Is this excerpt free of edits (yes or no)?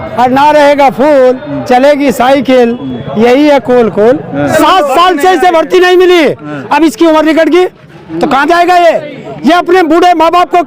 no